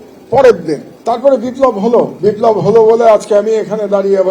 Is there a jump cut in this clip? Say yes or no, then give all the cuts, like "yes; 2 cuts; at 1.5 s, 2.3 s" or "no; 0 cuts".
yes; 2 cuts; at 0.9 s, 2.1 s